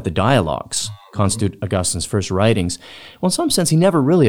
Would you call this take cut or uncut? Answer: cut